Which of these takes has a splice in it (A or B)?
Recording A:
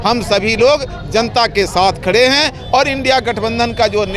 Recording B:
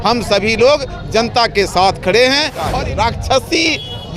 B